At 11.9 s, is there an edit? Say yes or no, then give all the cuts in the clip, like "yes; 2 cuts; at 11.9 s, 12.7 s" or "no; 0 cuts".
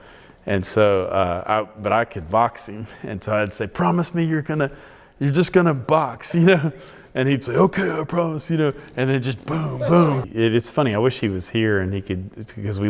no; 1 cut; at 10.3 s